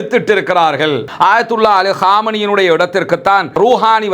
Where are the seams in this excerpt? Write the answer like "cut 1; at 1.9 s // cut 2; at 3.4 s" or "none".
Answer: cut 1; at 1.0 s